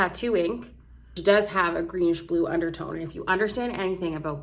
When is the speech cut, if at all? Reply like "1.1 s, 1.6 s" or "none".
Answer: 1.2 s

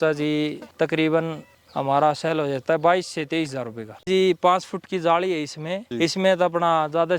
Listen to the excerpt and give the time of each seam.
4.1 s

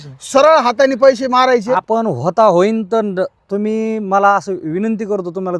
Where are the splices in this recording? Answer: 1.8 s

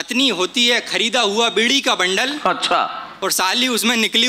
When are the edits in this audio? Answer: none

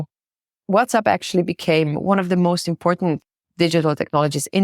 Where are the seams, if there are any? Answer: 3.3 s

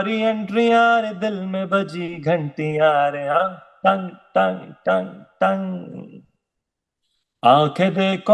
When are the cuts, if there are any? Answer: none

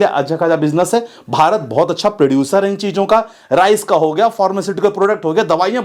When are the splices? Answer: none

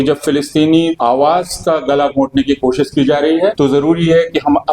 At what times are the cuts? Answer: 1.0 s, 3.5 s

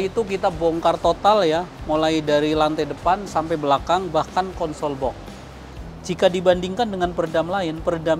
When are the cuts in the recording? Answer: 5.7 s

